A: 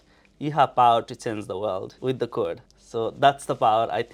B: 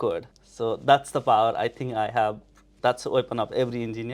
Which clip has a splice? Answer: B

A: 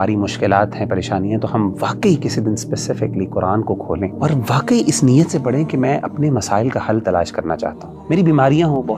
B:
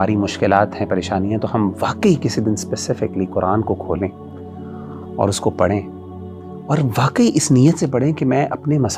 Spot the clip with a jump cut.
A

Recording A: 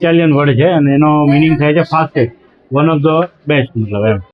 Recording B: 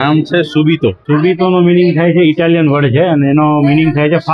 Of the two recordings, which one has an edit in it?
B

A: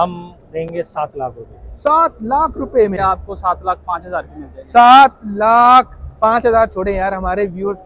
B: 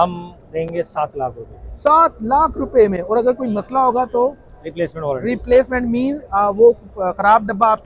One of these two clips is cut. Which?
A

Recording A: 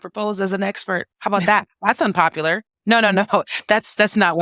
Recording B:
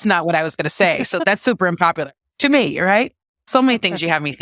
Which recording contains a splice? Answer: B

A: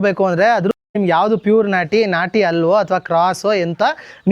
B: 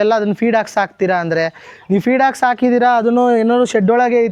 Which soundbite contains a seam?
A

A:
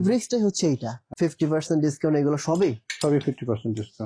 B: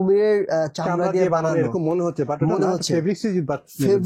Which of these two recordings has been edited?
A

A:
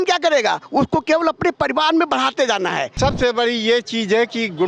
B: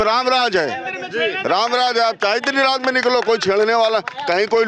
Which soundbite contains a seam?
A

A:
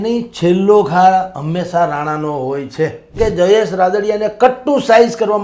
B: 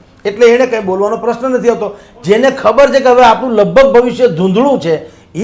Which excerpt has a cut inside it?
A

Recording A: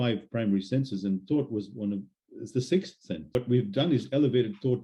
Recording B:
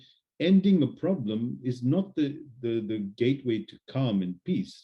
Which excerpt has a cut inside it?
A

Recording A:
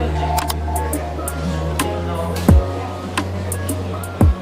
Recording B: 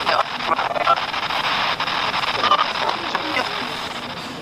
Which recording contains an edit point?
A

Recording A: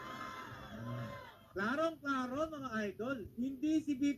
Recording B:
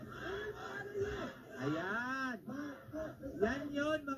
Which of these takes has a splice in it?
B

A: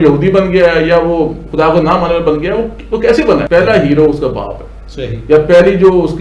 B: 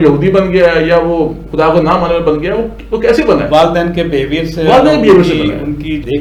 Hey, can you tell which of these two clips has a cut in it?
A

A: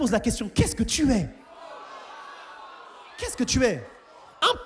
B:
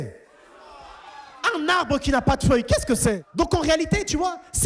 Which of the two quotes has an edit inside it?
B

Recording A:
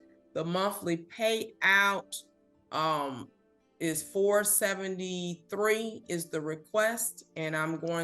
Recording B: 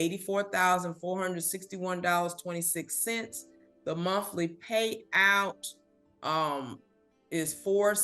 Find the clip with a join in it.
A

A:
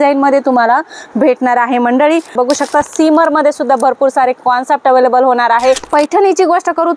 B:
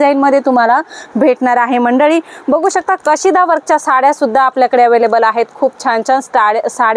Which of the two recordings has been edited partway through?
A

